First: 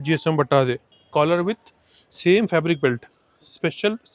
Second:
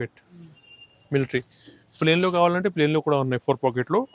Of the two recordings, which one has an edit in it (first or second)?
first